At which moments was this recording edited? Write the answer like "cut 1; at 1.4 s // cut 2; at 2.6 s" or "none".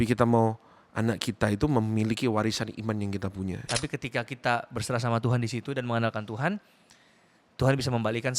cut 1; at 3.6 s

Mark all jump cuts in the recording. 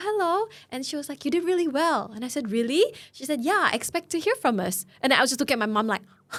none

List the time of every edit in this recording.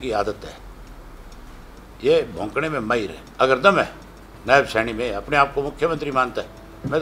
cut 1; at 3.2 s

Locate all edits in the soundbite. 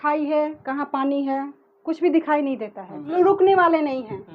cut 1; at 3.1 s

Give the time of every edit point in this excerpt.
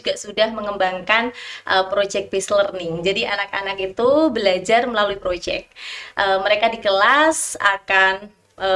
none

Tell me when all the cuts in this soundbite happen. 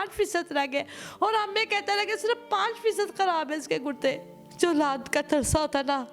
cut 1; at 4.4 s

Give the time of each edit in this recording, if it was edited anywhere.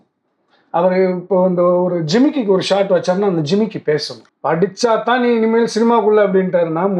cut 1; at 4.3 s

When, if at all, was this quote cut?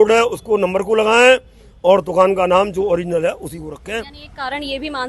none

